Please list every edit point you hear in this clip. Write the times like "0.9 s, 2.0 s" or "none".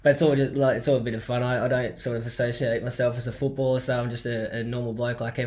none